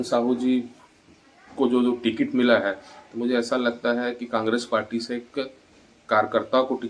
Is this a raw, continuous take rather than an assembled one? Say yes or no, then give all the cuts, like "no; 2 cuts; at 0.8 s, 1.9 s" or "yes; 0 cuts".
yes; 0 cuts